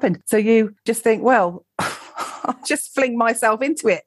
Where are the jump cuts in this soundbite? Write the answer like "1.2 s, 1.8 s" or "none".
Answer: none